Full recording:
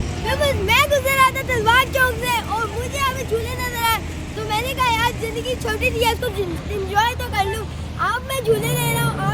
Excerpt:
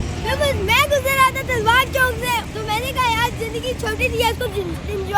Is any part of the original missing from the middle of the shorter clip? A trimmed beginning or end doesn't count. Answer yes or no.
yes